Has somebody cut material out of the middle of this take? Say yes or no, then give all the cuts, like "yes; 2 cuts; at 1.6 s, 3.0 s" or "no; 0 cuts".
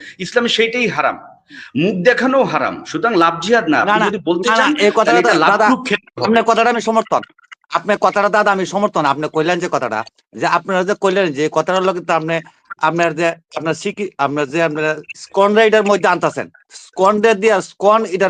no; 0 cuts